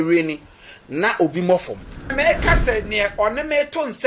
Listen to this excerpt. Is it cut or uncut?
cut